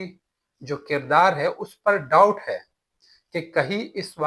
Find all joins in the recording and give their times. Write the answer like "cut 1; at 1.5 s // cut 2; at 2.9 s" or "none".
none